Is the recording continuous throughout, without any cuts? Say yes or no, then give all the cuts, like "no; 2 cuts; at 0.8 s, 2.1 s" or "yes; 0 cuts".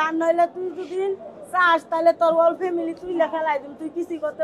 yes; 0 cuts